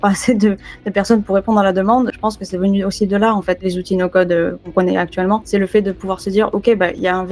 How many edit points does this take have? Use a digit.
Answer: 4